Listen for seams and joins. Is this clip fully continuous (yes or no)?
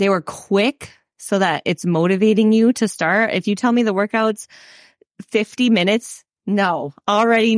yes